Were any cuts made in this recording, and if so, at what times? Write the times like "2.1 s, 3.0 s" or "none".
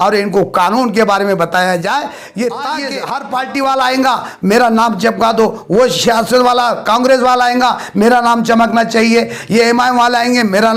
2.9 s